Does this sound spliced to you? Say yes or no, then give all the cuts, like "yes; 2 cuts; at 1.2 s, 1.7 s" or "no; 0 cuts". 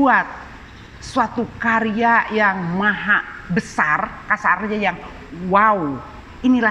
no; 0 cuts